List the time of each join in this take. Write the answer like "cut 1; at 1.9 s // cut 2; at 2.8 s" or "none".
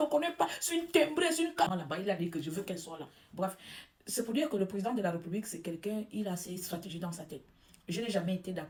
none